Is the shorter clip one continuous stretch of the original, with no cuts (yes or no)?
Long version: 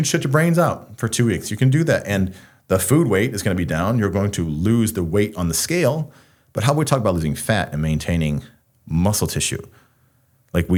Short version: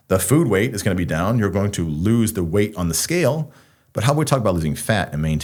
yes